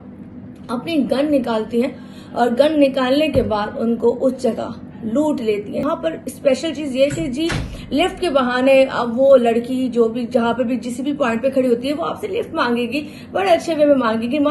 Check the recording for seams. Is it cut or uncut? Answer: cut